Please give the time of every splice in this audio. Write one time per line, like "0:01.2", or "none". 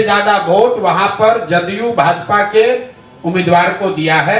none